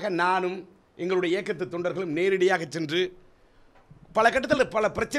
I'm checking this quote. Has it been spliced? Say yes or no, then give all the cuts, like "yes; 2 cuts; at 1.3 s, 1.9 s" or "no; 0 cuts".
no; 0 cuts